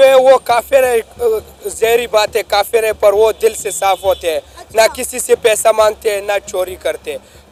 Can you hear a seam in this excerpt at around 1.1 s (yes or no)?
no